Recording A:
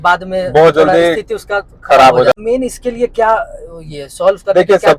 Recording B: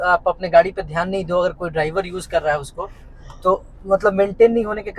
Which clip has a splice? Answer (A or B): A